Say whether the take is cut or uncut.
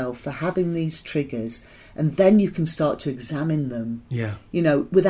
uncut